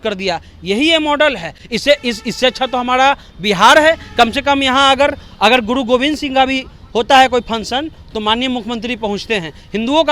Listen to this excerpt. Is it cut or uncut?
uncut